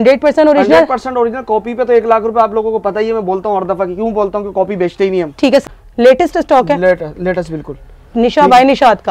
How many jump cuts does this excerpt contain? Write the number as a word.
one